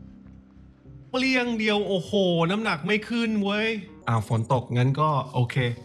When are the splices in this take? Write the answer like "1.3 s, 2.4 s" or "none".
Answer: 3.9 s